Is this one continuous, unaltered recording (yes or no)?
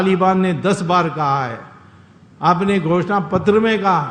yes